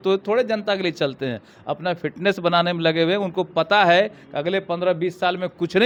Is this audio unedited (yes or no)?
yes